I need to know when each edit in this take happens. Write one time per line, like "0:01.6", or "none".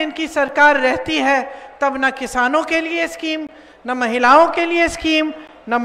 none